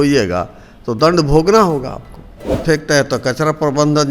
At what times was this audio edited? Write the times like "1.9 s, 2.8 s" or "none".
2.6 s